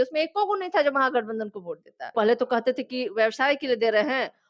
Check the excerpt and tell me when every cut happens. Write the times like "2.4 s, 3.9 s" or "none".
2.1 s